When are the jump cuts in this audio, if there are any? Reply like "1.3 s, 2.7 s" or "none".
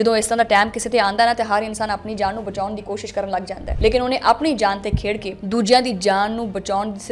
none